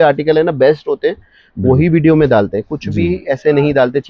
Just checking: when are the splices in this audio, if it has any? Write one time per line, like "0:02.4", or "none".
none